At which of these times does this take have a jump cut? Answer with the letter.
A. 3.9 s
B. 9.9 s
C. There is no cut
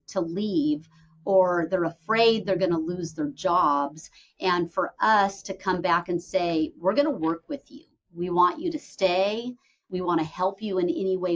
B